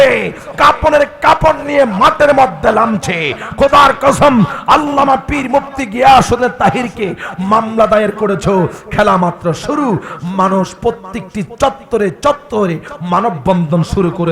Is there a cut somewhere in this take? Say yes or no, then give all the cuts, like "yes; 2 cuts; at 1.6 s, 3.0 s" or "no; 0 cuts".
no; 0 cuts